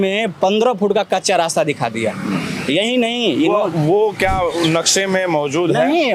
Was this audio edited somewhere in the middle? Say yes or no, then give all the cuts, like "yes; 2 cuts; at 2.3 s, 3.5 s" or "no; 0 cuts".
no; 0 cuts